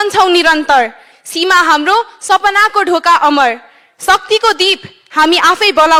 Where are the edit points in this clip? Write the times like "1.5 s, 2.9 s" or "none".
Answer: none